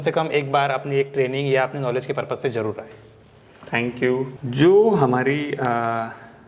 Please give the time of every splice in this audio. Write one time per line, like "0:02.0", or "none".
0:04.4

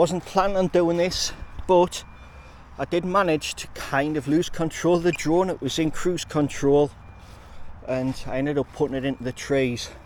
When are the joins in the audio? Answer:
none

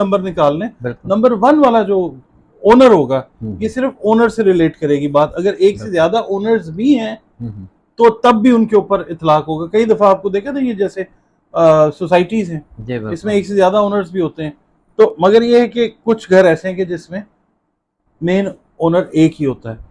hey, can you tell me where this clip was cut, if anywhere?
none

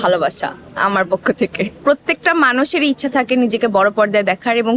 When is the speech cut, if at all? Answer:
0:01.8

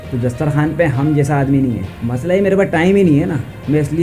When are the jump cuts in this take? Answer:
0:01.9

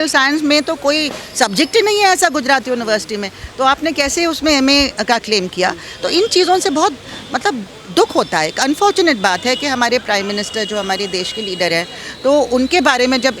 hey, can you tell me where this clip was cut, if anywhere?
none

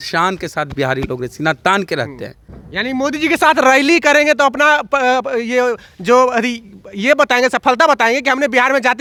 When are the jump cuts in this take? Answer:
none

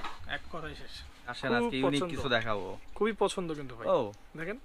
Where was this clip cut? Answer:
0:01.4

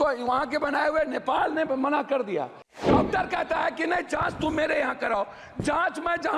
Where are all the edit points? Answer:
0:02.8

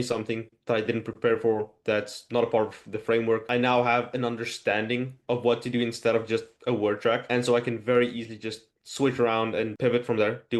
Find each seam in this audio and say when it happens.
none

